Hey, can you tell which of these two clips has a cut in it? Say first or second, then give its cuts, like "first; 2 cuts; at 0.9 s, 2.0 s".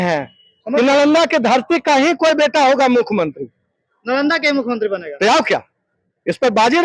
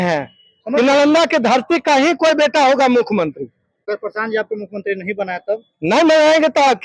second; 1 cut; at 3.8 s